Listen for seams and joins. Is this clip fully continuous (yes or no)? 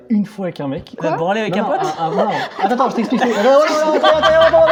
yes